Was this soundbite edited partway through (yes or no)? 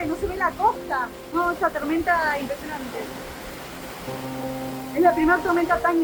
no